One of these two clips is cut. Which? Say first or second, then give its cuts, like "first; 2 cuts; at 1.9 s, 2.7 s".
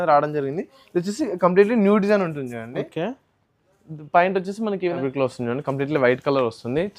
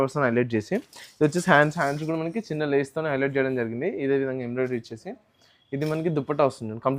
first; 1 cut; at 5.0 s